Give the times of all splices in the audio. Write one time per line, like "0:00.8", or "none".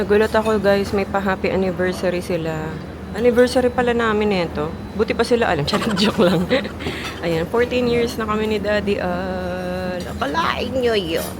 none

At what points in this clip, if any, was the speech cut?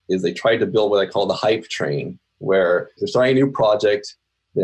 none

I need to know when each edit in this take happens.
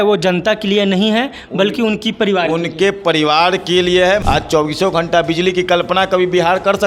0:04.2

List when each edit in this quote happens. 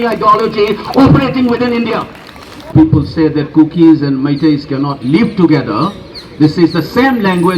0:02.7

